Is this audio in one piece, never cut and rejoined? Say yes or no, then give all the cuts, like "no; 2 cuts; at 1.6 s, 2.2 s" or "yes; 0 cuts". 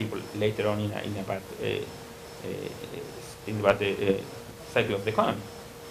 yes; 0 cuts